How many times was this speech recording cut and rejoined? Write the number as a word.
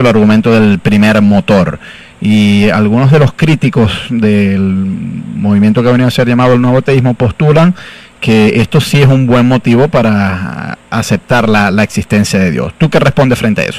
one